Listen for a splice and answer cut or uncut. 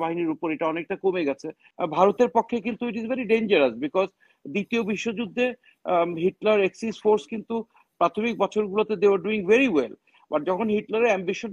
cut